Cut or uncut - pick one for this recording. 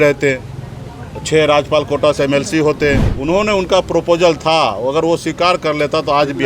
cut